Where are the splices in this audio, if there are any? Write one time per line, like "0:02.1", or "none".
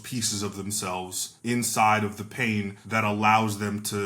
0:01.2
0:02.8